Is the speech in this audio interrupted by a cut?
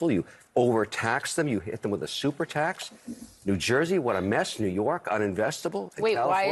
no; 0 cuts

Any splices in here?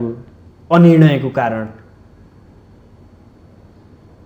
no; 0 cuts

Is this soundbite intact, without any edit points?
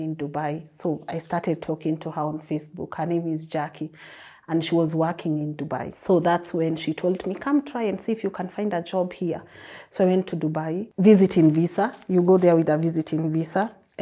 yes; 0 cuts

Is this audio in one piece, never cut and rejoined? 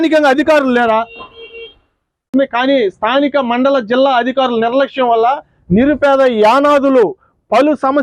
no; 1 cut; at 2.3 s

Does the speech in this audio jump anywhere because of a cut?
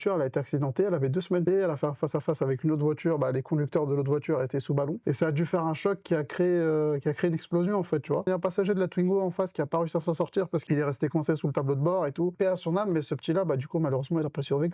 yes; 5 cuts; at 1.4 s, 5.0 s, 8.3 s, 10.6 s, 12.3 s

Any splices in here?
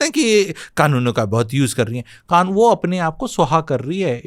no; 0 cuts

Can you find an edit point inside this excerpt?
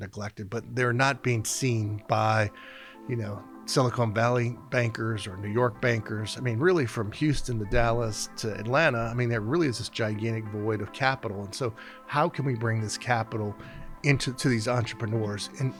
no; 0 cuts

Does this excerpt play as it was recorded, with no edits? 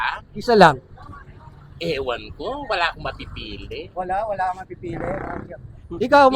yes; 0 cuts

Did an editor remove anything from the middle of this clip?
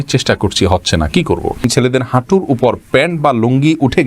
yes; 1 cut; at 1.6 s

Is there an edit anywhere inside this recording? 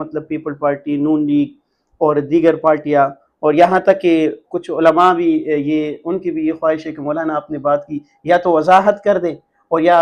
no; 0 cuts

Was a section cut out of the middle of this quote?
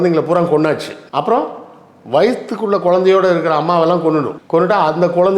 yes; 2 cuts; at 1.0 s, 4.4 s

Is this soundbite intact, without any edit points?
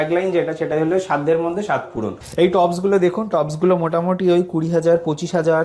no; 1 cut; at 2.2 s

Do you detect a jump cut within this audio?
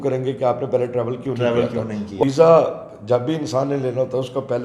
yes; 1 cut; at 2.2 s

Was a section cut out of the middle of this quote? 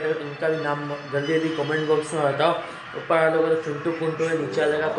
no; 0 cuts

